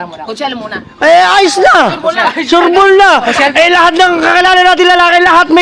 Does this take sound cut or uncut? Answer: uncut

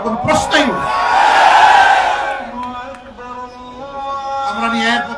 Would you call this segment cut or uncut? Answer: uncut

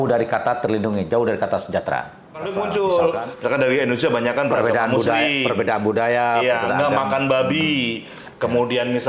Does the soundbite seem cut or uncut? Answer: cut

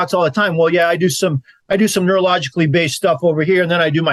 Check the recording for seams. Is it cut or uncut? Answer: uncut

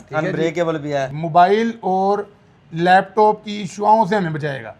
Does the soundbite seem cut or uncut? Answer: cut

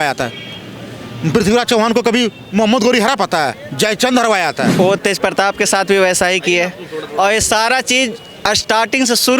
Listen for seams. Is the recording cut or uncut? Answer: cut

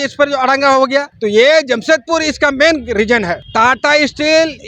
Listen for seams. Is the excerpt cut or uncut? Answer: cut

